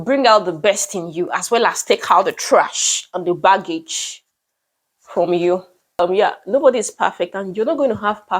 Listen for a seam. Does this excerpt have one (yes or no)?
yes